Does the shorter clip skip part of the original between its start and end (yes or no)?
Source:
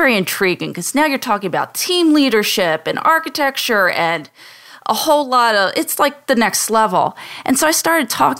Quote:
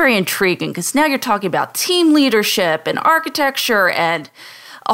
no